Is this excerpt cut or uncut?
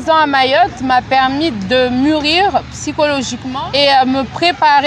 cut